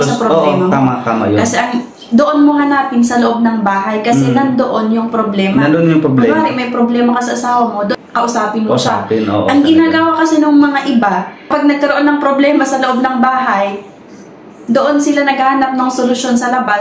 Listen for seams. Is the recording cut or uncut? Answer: uncut